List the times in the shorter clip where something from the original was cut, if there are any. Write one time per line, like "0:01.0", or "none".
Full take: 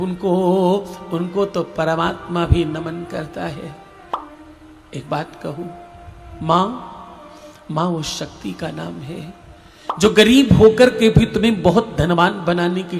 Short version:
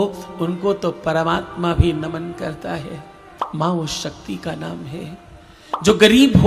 0:03.5